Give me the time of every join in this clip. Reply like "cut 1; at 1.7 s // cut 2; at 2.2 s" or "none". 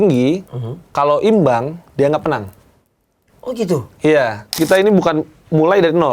cut 1; at 4.6 s